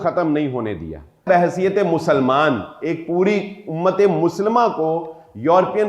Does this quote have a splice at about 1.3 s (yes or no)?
yes